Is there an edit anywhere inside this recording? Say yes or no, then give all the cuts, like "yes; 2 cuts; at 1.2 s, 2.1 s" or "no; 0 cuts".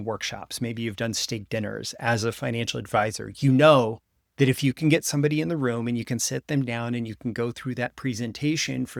no; 0 cuts